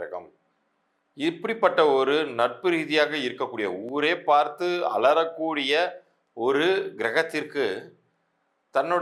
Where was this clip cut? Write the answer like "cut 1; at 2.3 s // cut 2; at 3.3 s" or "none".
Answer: none